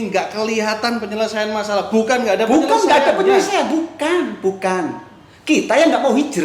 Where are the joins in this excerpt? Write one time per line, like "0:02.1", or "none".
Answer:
none